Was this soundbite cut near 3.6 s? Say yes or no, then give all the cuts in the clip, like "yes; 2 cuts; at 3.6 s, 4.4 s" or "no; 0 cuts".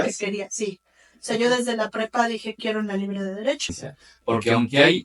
yes; 1 cut; at 3.6 s